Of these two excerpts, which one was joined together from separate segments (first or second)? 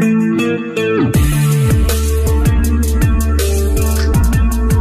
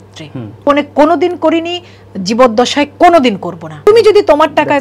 second